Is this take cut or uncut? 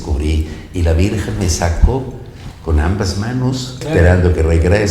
cut